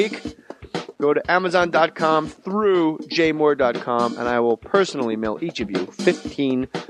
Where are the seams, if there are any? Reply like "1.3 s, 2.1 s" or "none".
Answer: 1.1 s